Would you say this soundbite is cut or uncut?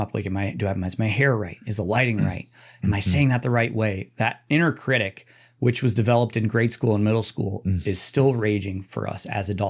uncut